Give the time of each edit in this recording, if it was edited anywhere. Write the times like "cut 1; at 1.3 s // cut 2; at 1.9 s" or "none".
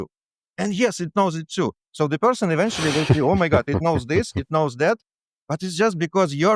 none